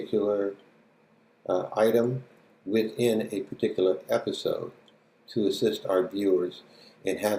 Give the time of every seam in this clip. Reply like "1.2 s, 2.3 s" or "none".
2.0 s